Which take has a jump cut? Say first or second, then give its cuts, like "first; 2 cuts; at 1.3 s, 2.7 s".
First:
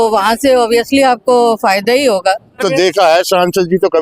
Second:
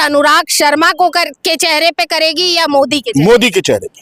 first; 1 cut; at 2.6 s